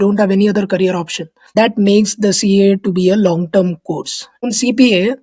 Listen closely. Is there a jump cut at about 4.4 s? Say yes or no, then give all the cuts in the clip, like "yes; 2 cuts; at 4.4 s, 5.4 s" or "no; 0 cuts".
yes; 2 cuts; at 1.5 s, 4.4 s